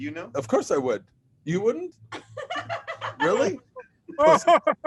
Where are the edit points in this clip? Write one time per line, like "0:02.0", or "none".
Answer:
none